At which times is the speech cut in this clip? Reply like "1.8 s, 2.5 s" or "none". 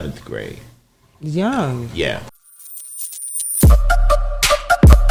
2.2 s